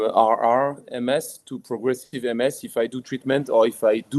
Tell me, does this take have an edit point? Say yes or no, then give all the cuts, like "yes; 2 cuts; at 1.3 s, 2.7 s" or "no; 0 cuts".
no; 0 cuts